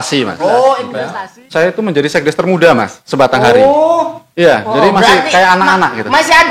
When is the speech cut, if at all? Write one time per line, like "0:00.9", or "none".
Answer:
0:00.9